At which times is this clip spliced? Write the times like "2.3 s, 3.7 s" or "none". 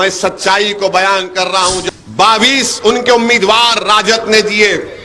1.8 s